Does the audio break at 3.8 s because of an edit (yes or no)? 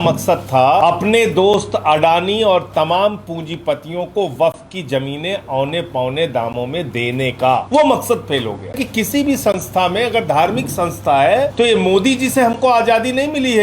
no